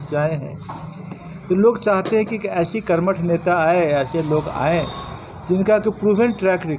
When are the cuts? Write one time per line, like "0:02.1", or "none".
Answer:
none